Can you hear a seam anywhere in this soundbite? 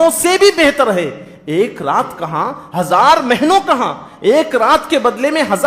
no; 0 cuts

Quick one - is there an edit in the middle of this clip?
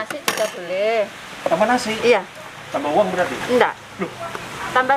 no; 0 cuts

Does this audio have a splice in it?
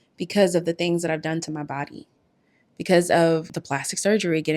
yes; 1 cut; at 3.5 s

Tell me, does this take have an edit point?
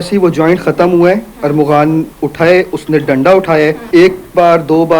yes; 1 cut; at 3.8 s

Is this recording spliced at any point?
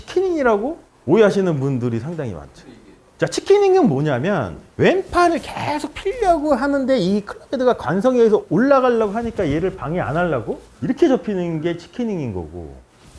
no; 0 cuts

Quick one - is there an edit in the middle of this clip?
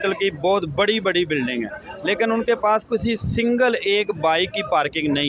no; 0 cuts

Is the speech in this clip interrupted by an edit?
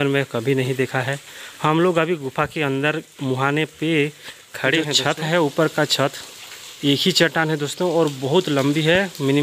yes; 1 cut; at 5.0 s

